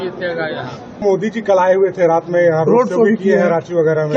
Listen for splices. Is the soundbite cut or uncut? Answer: cut